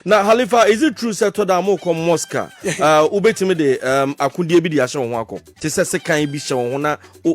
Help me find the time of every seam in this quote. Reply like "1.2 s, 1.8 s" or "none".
5.5 s